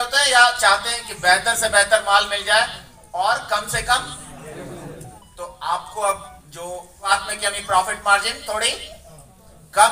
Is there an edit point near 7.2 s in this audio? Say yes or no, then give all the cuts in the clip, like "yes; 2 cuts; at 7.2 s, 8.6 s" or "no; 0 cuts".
yes; 1 cut; at 7.2 s